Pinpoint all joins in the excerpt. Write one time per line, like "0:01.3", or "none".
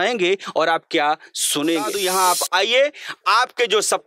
0:02.0